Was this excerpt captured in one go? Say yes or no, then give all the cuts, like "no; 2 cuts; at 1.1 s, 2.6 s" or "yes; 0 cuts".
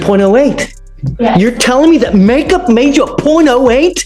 yes; 0 cuts